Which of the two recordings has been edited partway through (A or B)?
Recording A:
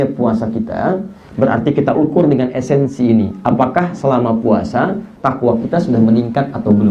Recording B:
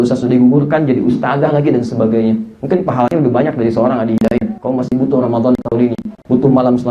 B